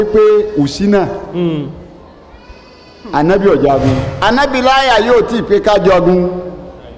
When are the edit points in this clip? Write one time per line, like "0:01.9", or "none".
0:04.1